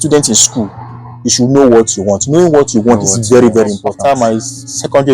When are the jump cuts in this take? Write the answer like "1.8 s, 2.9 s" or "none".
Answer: 3.8 s

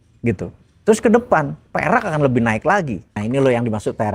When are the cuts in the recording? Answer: 3.2 s

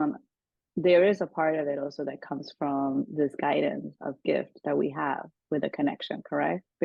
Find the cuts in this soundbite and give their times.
none

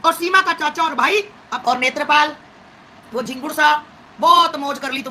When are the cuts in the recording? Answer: 1.4 s

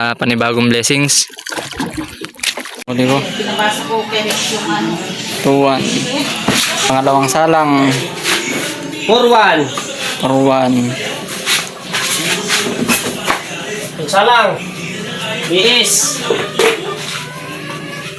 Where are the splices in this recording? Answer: 2.9 s

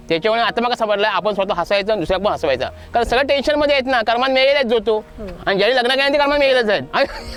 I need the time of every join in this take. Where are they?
none

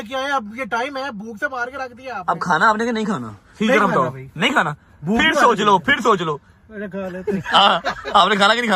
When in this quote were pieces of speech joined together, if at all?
none

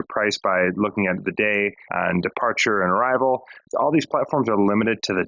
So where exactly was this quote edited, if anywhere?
1.8 s, 3.6 s

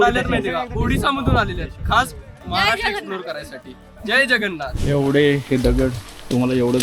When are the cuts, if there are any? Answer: 4.8 s

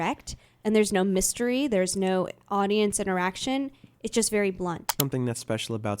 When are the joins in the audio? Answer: 4.9 s

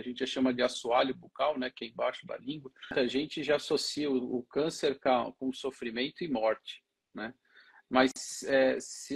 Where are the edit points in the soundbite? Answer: 2.9 s

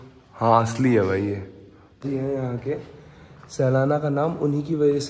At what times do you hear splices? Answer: 2.0 s

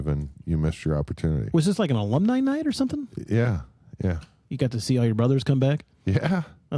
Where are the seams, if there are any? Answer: none

